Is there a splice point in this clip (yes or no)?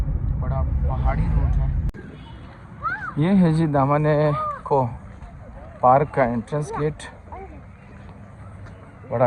yes